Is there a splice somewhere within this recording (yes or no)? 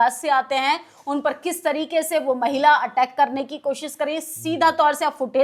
no